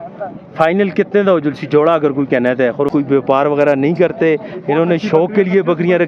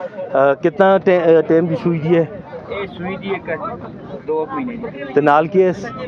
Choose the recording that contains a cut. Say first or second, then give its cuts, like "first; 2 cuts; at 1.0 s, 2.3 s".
first; 1 cut; at 2.9 s